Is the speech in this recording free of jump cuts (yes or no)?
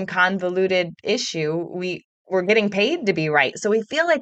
yes